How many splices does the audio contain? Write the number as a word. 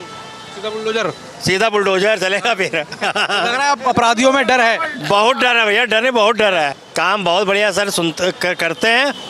one